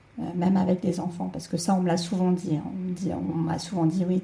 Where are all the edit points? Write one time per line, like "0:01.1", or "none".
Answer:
none